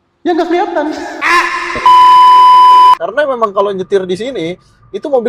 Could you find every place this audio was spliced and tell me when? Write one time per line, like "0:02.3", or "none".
0:03.0